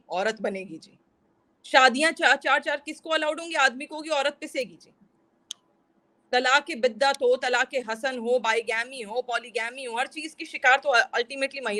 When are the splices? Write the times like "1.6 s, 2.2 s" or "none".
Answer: none